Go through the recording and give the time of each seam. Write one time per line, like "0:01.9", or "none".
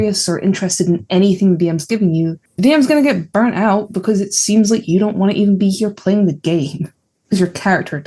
0:02.4